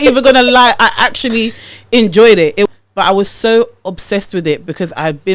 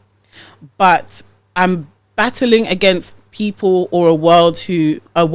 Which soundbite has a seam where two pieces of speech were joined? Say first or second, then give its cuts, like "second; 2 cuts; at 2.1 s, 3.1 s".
first; 1 cut; at 2.7 s